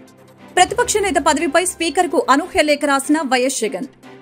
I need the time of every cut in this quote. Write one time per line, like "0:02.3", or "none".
none